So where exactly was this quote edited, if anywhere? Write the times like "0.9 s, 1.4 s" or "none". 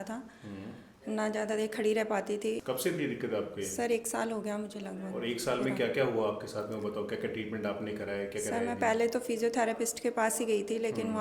none